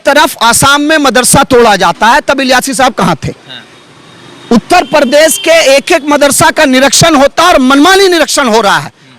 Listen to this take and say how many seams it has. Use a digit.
0